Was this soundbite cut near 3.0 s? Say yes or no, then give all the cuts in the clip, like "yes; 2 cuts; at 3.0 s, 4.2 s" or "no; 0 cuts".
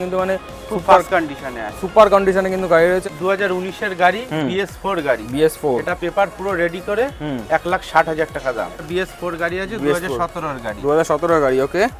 yes; 2 cuts; at 3.0 s, 8.8 s